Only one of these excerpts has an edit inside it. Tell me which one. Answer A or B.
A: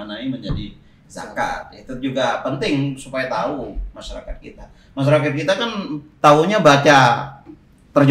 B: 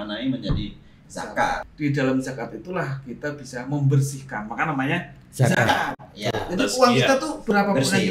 B